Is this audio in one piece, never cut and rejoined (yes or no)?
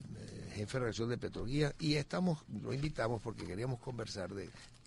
no